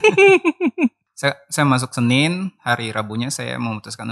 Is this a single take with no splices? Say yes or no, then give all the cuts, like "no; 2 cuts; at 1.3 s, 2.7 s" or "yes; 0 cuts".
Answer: no; 1 cut; at 1.1 s